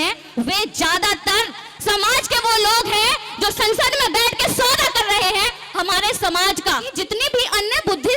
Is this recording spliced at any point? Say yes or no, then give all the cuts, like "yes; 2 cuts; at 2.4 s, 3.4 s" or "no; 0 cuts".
yes; 1 cut; at 6.9 s